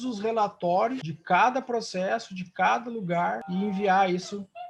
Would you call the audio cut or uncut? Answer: cut